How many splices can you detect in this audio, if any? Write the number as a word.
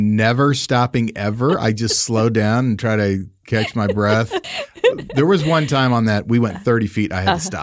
one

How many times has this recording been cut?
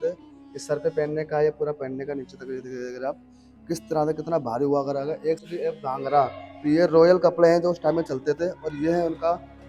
one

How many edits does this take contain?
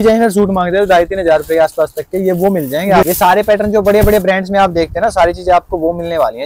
one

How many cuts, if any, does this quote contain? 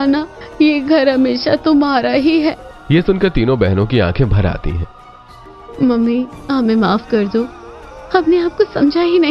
one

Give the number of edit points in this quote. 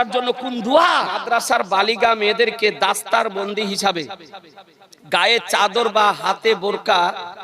one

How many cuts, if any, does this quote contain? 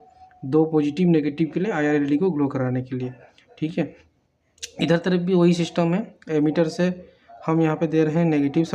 zero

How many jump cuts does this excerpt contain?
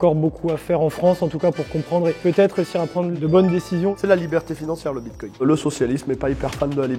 one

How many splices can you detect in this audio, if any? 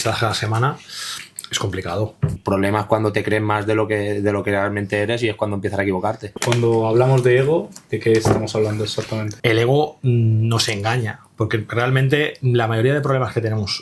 three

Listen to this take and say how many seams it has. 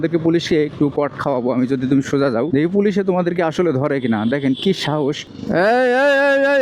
one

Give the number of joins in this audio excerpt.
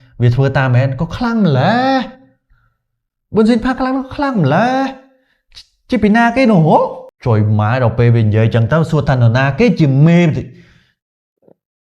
one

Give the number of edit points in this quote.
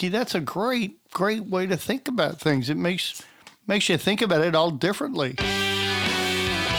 one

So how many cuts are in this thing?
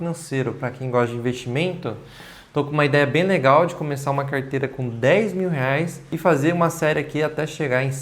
one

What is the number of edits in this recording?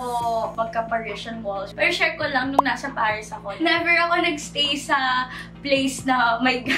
one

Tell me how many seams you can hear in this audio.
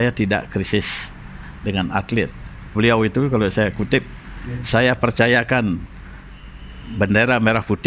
one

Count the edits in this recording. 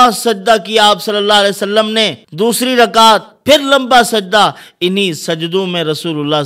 one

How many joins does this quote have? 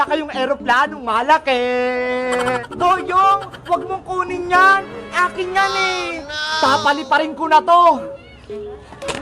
two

